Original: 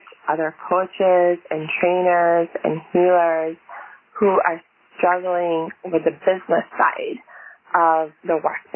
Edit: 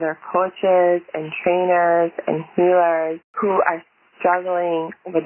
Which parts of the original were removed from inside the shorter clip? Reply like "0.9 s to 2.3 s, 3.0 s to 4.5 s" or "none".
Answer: 3.6 s to 4.0 s